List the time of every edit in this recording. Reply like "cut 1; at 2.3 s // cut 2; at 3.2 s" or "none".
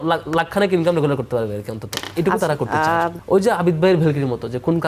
cut 1; at 3.2 s